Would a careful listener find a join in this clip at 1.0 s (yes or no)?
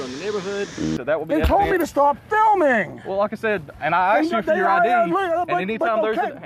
yes